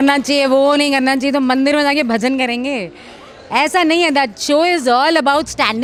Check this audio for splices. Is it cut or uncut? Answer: uncut